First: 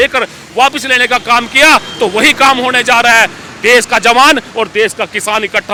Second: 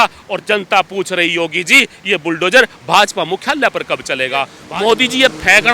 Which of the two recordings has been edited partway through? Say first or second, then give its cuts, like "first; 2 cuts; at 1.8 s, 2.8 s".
second; 1 cut; at 4.6 s